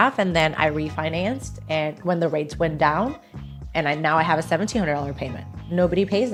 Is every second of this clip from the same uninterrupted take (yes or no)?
yes